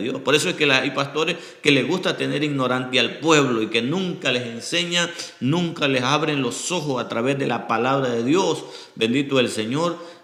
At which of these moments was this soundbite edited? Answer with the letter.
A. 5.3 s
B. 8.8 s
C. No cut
C